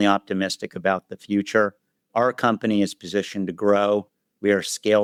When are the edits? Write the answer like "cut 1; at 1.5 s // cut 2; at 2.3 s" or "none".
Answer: none